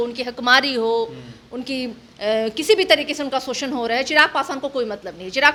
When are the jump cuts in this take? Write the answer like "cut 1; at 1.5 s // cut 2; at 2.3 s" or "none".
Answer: none